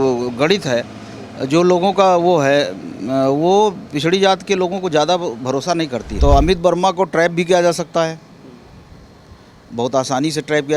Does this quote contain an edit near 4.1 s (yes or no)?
no